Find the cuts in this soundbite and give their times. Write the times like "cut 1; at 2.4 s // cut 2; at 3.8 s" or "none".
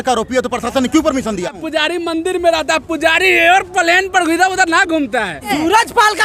cut 1; at 1.5 s // cut 2; at 5.5 s

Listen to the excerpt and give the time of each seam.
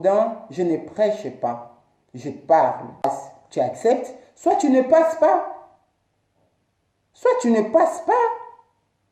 cut 1; at 3.0 s

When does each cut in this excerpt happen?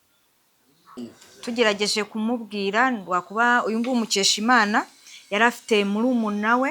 cut 1; at 1.0 s

